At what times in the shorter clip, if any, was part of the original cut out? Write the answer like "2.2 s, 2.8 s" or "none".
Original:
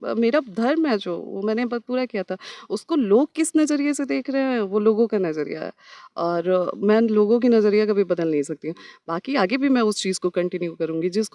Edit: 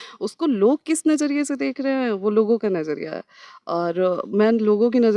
none